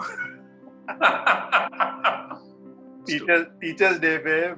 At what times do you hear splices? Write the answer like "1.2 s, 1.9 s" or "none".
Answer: 3.0 s